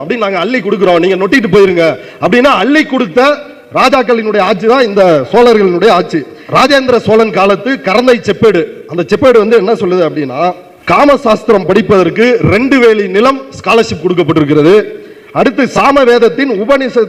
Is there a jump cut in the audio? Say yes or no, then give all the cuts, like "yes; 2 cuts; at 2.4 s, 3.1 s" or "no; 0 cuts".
yes; 3 cuts; at 6.4 s, 10.7 s, 15.7 s